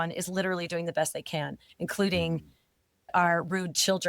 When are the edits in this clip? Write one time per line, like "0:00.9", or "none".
0:03.1